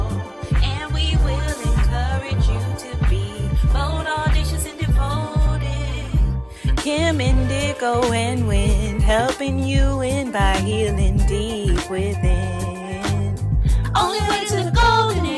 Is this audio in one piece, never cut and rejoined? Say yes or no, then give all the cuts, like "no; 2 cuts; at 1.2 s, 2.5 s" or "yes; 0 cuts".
yes; 0 cuts